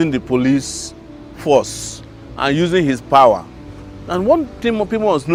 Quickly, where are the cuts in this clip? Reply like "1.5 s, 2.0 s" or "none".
none